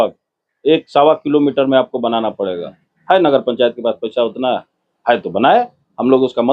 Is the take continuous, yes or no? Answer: yes